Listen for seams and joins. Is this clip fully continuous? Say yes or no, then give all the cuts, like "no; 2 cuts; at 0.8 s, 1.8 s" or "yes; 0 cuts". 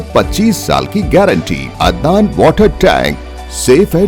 no; 1 cut; at 1.7 s